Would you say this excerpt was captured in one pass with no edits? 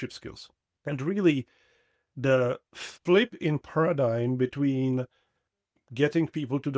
yes; 0 cuts

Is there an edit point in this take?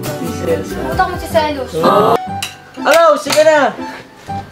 yes; 1 cut; at 2.2 s

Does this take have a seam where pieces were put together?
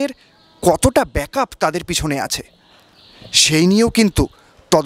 no; 0 cuts

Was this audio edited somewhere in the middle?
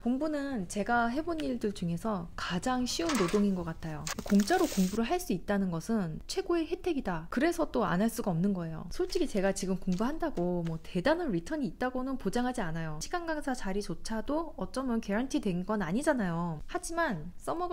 yes; 6 cuts; at 4.2 s, 6.2 s, 7.2 s, 8.8 s, 13.0 s, 16.6 s

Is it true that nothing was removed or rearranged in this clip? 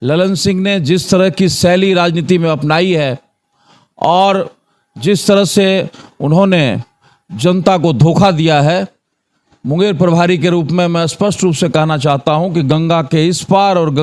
yes; 0 cuts

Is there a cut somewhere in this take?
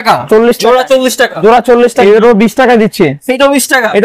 yes; 1 cut; at 2.0 s

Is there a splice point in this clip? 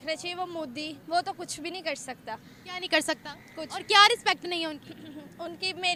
no; 0 cuts

